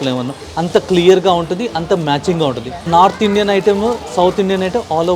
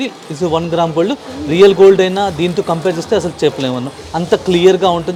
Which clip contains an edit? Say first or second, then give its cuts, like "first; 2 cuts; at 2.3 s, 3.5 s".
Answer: first; 1 cut; at 2.9 s